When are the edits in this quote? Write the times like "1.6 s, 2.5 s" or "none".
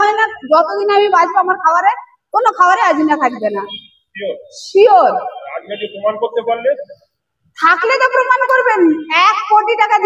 none